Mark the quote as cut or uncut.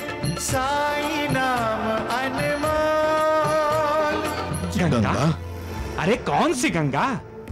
cut